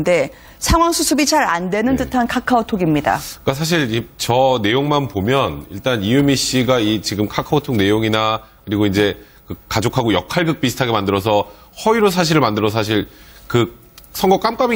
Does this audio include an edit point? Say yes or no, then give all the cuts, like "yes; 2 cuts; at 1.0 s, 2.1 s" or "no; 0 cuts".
no; 0 cuts